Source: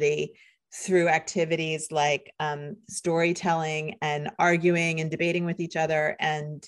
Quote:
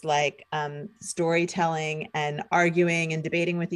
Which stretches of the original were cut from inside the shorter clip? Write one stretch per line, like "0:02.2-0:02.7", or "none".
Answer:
none